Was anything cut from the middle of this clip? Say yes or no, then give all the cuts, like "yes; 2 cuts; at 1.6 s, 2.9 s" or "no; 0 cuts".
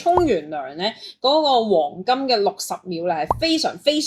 no; 0 cuts